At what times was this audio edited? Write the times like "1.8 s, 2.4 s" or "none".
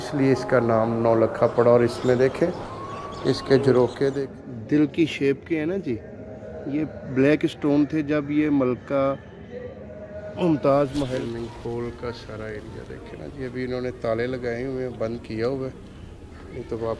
4.3 s, 11.1 s